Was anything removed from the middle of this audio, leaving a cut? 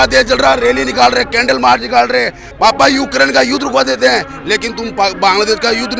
yes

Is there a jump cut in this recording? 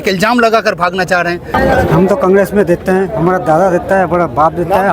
yes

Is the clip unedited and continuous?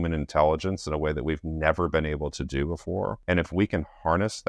no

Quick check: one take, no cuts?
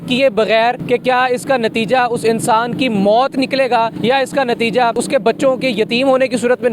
no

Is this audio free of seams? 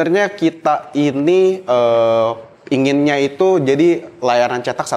yes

